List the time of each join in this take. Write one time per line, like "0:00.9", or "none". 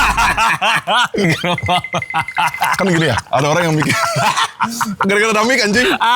0:01.2